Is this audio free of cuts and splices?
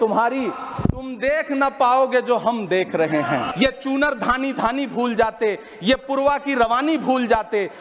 no; 1 cut; at 3.5 s

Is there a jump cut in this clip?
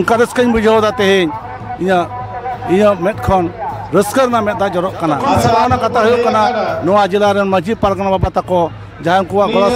yes; 1 cut; at 5.5 s

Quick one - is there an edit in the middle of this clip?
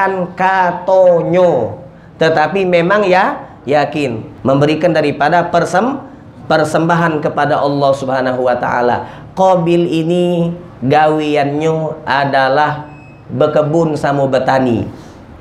yes; 1 cut; at 4.3 s

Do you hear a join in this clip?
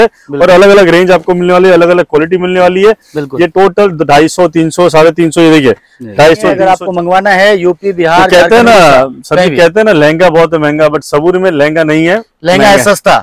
yes; 1 cut; at 6.6 s

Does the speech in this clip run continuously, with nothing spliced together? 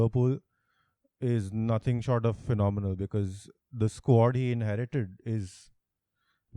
yes; 0 cuts

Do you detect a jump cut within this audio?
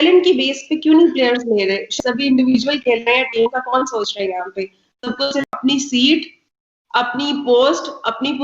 yes; 2 cuts; at 1.9 s, 5.5 s

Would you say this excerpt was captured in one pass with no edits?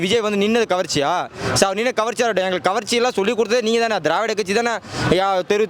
yes; 0 cuts

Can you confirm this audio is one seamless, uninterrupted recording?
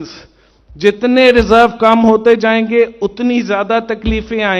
yes; 0 cuts

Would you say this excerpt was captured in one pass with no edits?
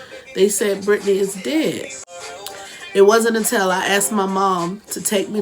no; 1 cut; at 1.9 s

